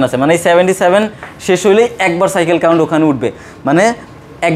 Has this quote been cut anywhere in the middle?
no; 0 cuts

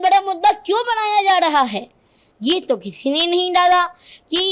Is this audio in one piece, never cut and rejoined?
yes; 0 cuts

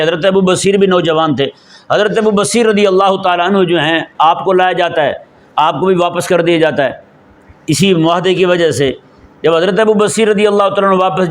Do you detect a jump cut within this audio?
no; 0 cuts

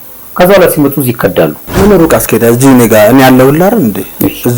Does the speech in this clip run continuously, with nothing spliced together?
no; 1 cut; at 1.6 s

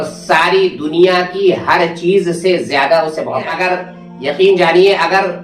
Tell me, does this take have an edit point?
yes; 1 cut; at 3.5 s

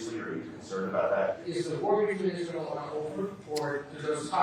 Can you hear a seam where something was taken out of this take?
yes; 2 cuts; at 1.4 s, 3.4 s

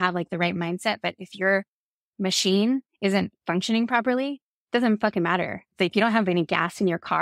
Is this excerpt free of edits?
no; 1 cut; at 5.7 s

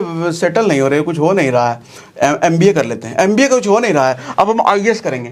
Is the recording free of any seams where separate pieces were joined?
yes; 0 cuts

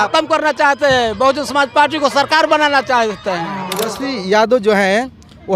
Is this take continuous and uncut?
no; 1 cut; at 3.8 s

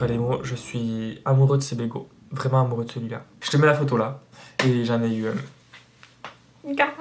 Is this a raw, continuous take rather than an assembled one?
no; 1 cut; at 3.4 s

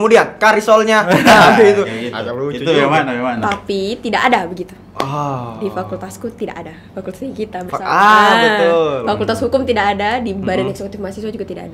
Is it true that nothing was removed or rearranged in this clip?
yes; 0 cuts

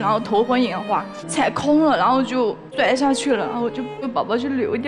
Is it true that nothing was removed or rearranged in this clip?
no; 3 cuts; at 1.2 s, 2.6 s, 4.0 s

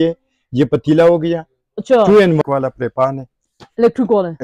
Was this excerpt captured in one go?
no; 1 cut; at 2.4 s

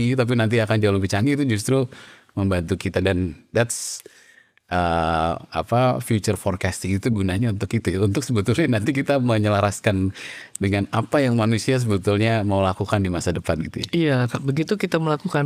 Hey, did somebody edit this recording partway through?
no; 0 cuts

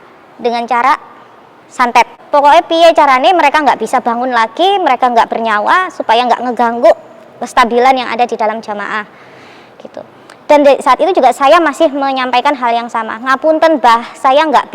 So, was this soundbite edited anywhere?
yes; 1 cut; at 2.2 s

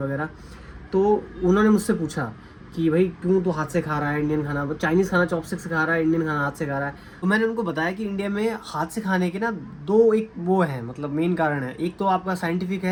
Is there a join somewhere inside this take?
no; 0 cuts

